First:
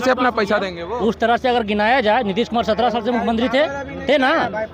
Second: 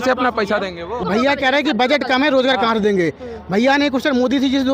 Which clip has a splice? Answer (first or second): second